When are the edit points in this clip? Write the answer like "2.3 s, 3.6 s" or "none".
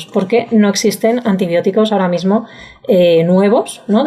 none